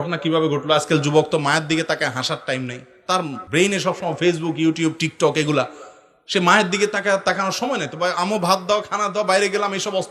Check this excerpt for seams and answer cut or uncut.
cut